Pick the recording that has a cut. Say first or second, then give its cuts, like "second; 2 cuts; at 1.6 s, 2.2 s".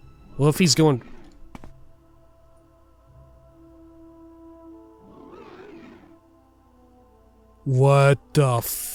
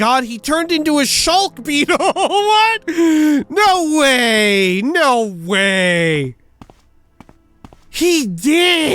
second; 1 cut; at 7.9 s